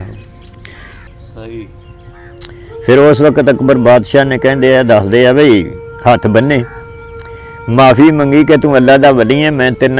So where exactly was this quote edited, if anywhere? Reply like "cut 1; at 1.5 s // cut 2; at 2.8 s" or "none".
cut 1; at 1.0 s